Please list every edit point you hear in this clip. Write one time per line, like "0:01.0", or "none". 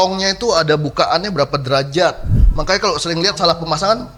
none

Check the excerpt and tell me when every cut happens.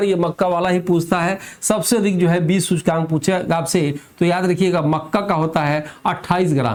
none

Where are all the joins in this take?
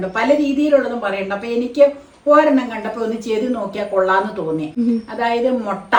none

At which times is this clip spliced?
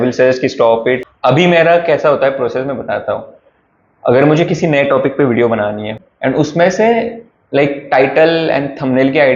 0:01.0
0:05.9

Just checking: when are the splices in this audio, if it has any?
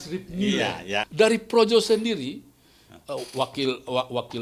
0:01.1

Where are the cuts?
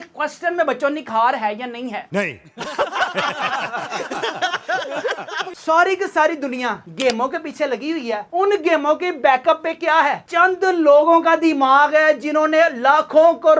0:02.1
0:05.5

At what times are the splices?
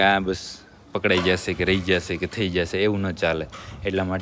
none

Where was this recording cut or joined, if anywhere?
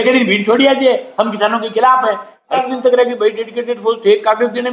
0:02.6

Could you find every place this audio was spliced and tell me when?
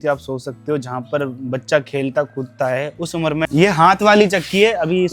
0:03.5

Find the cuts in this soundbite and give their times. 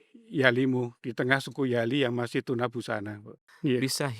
0:03.3

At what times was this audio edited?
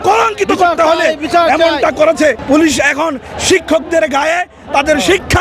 0:02.4

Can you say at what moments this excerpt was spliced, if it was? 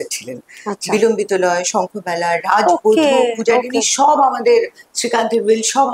none

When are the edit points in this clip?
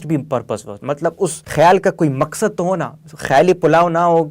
0:01.4

